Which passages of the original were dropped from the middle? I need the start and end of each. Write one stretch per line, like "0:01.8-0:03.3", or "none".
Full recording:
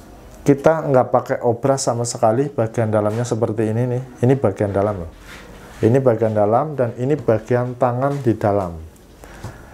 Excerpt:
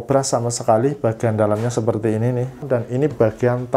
0:04.1-0:06.7